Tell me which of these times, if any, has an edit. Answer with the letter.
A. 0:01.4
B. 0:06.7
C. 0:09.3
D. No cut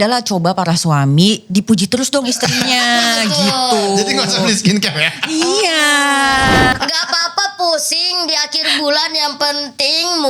B